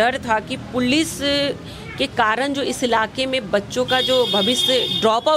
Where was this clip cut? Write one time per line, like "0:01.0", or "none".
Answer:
none

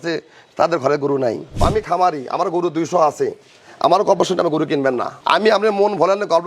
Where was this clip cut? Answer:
0:01.5
0:05.1

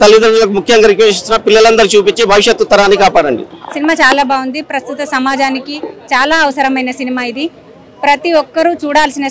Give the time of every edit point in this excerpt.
none

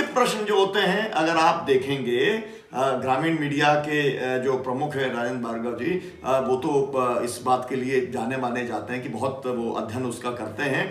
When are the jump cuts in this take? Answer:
none

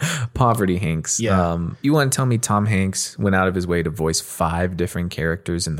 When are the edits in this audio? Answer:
0:01.7

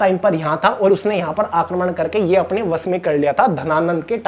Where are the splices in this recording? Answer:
none

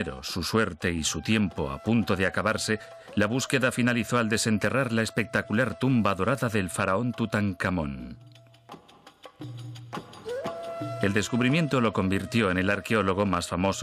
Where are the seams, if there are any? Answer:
none

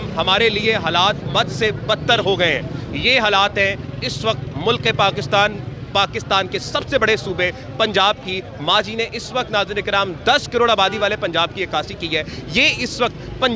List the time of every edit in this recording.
none

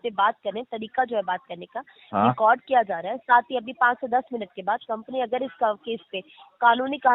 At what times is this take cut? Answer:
none

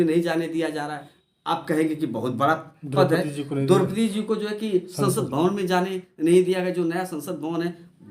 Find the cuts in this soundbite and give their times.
none

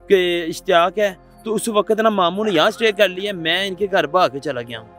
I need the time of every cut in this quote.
none

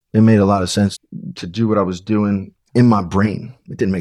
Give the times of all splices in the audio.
0:01.1

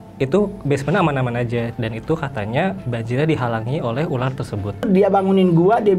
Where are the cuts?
0:01.8
0:02.8
0:04.8

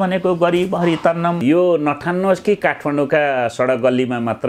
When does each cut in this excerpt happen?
0:01.4

